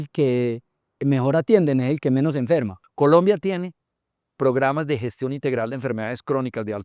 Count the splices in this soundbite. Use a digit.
1